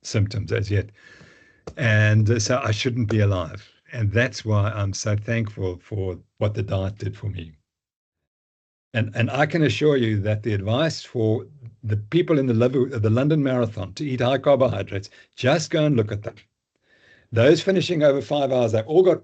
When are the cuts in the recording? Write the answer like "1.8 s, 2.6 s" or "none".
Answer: none